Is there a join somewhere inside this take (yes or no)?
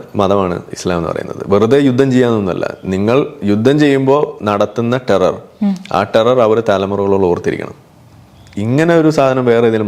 no